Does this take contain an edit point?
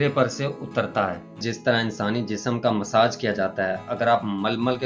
yes; 1 cut; at 1.5 s

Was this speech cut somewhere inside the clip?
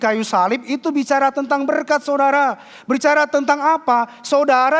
no; 0 cuts

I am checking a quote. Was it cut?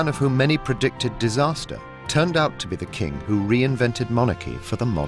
no; 0 cuts

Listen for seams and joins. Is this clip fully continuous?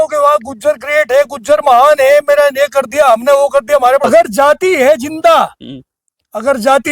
no; 1 cut; at 4.0 s

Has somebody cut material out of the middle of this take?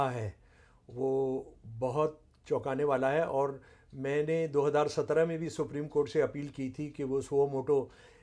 no; 0 cuts

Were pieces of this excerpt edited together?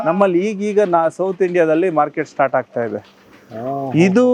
no; 0 cuts

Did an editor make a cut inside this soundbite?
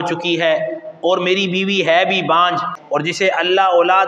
yes; 1 cut; at 2.7 s

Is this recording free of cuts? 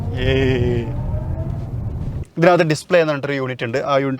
no; 1 cut; at 2.3 s

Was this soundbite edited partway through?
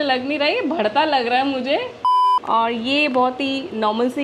yes; 1 cut; at 2.0 s

